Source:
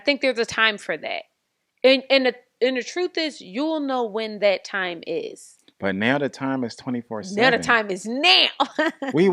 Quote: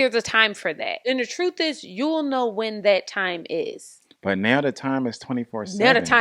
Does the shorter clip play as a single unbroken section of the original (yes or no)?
no